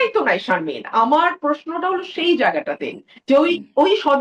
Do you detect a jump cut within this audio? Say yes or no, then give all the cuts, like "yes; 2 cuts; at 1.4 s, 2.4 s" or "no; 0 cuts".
no; 0 cuts